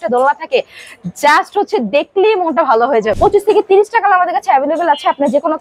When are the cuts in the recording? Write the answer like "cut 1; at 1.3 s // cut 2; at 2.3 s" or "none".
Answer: cut 1; at 3.1 s